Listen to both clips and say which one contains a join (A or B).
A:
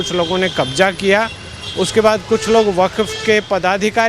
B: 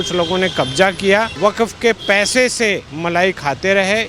B